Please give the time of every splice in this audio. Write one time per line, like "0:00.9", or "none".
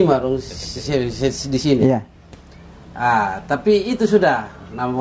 none